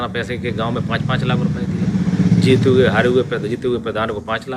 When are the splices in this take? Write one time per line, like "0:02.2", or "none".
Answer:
none